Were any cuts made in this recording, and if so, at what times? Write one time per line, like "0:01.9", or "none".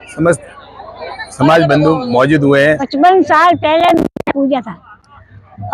0:02.9